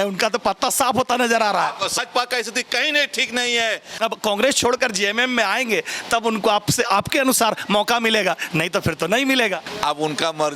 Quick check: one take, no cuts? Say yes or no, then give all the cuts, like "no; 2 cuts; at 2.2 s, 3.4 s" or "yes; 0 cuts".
no; 3 cuts; at 2.0 s, 3.9 s, 9.7 s